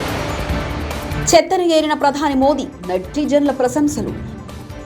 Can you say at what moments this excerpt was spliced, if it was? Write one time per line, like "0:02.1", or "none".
0:01.1